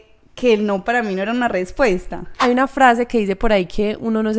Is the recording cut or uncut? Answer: cut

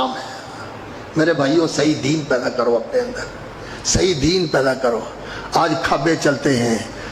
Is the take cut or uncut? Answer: uncut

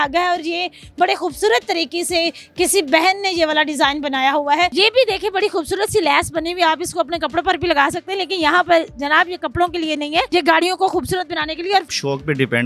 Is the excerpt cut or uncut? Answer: cut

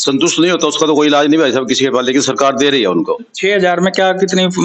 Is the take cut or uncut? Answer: uncut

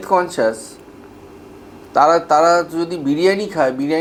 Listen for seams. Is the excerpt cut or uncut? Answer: uncut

